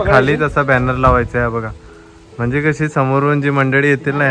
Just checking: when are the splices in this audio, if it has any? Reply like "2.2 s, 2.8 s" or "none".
none